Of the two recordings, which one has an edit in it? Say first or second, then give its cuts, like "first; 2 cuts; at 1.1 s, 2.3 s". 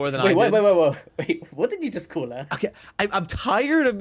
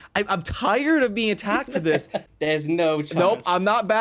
second; 1 cut; at 2.2 s